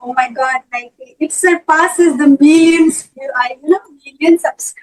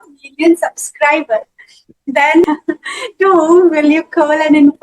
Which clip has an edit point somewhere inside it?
second; 1 cut; at 2.5 s

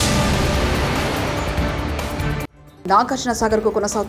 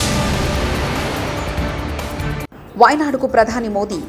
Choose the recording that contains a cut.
second; 1 cut; at 2.5 s

